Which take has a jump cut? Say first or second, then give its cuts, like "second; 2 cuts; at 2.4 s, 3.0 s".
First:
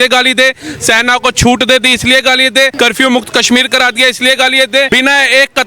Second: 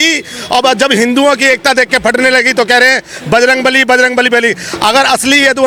first; 2 cuts; at 2.7 s, 4.9 s